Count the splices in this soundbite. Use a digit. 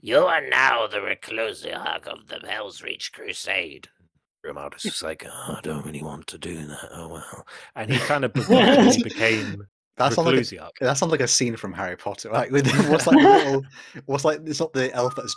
0